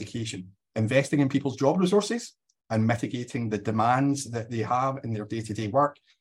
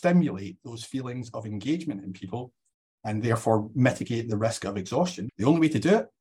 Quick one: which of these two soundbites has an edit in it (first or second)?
second